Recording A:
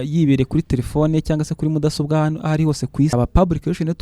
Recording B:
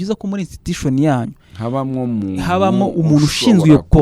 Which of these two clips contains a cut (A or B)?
A